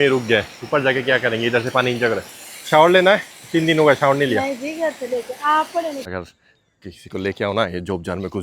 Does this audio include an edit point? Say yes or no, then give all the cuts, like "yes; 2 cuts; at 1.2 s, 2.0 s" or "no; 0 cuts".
yes; 1 cut; at 6.0 s